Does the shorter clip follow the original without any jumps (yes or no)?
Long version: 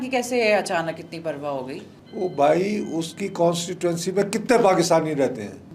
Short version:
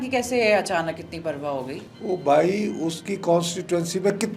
no